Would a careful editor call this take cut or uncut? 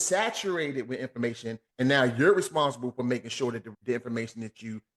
cut